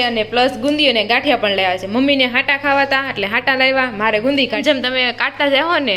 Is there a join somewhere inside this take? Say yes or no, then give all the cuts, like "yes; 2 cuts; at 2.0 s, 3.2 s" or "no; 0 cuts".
yes; 1 cut; at 4.6 s